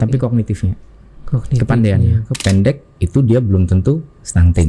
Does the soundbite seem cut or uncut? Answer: cut